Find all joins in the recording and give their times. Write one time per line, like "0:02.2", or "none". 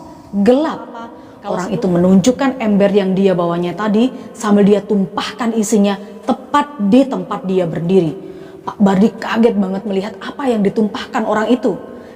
0:01.0